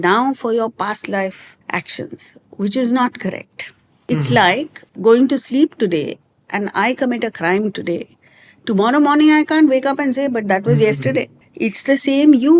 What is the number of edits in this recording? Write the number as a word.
four